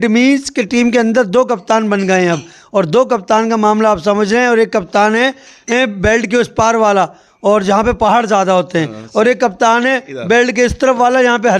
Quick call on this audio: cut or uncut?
uncut